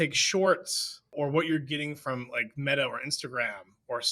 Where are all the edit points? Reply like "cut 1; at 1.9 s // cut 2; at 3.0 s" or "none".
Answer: cut 1; at 1.1 s